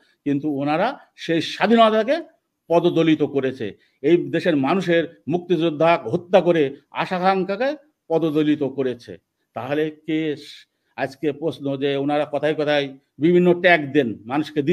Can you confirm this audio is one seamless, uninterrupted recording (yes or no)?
yes